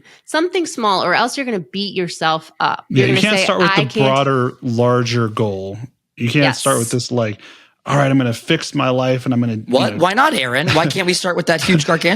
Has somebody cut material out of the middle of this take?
yes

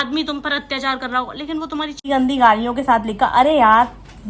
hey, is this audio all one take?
no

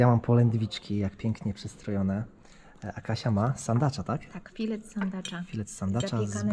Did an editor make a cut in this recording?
no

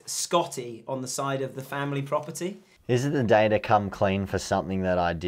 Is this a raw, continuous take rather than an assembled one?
no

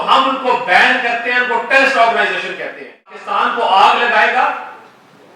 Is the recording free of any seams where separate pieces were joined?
no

